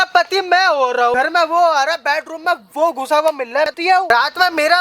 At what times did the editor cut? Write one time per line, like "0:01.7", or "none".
0:01.1
0:03.9